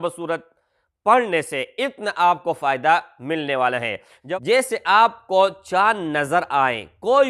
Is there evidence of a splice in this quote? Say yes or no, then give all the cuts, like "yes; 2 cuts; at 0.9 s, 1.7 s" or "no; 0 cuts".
yes; 1 cut; at 4.1 s